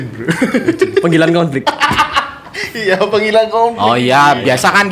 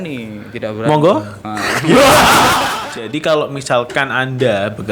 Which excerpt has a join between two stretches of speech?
second; 1 cut; at 2.7 s

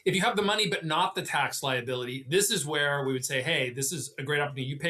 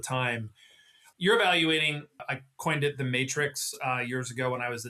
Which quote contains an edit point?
second; 2 cuts; at 1.0 s, 2.2 s

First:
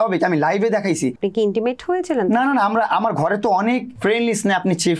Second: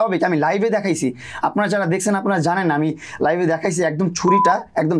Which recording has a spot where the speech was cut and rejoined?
first; 2 cuts; at 1.2 s, 3.9 s

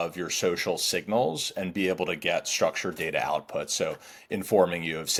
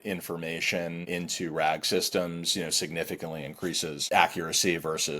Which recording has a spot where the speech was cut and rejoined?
second; 2 cuts; at 1.1 s, 4.0 s

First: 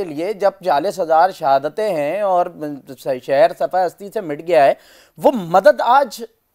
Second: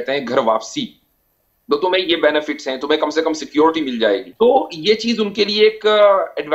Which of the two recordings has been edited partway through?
second; 1 cut; at 4.3 s

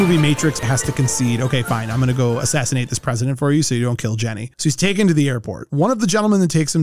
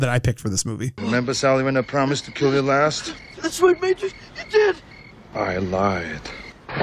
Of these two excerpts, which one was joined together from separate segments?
first; 1 cut; at 4.5 s

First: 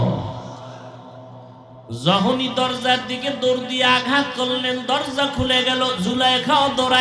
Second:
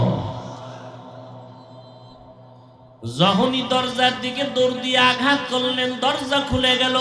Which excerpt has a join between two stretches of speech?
first; 1 cut; at 1.8 s

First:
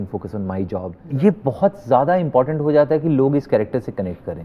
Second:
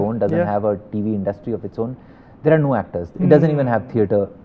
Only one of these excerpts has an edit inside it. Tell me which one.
first; 1 cut; at 1.0 s

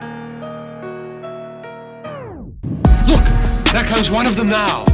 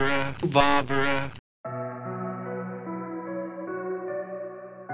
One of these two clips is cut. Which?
second; 1 cut; at 1.3 s

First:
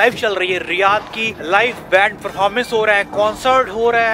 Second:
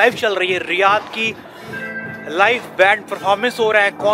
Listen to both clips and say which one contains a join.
first; 1 cut; at 1.3 s

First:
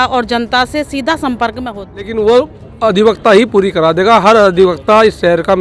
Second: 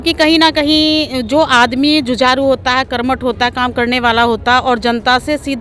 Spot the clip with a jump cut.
first; 1 cut; at 2.1 s

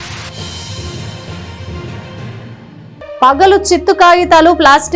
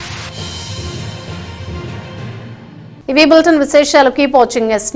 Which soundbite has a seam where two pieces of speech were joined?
first; 1 cut; at 2.9 s

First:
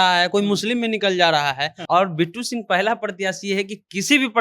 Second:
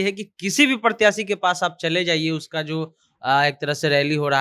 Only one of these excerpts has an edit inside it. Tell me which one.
first; 1 cut; at 1.7 s

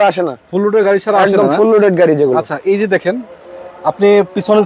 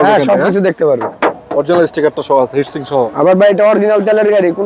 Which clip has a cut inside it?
second; 1 cut; at 1.1 s

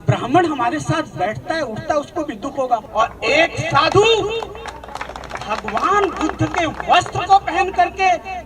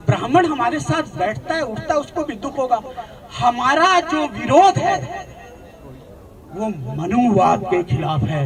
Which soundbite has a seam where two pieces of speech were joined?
first; 1 cut; at 2.9 s

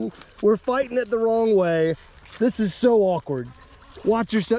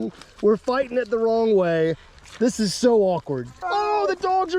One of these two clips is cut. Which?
second; 1 cut; at 3.6 s

